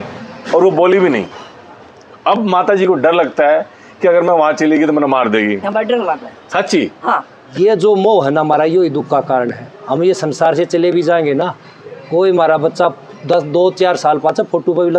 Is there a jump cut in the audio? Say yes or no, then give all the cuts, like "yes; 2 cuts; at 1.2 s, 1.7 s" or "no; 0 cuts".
yes; 1 cut; at 7.3 s